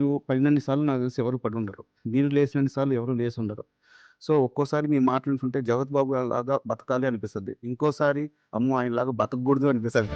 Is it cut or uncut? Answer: uncut